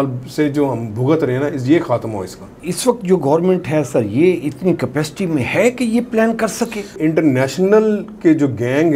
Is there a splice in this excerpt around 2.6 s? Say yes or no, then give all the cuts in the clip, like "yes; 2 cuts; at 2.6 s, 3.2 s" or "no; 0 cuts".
yes; 2 cuts; at 2.6 s, 6.9 s